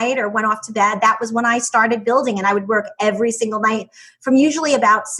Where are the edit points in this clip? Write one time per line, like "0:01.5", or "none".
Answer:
none